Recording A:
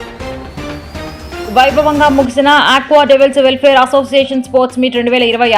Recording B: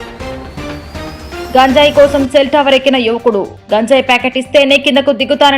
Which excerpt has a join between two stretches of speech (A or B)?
B